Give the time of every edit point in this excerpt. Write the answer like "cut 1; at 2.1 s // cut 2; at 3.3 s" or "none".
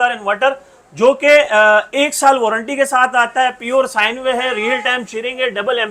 none